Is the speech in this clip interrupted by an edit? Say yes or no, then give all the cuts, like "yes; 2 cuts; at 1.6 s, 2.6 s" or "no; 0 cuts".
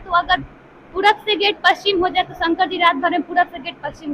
no; 0 cuts